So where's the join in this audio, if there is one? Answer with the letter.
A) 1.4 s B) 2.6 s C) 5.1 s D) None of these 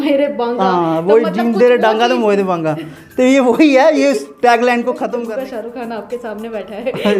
C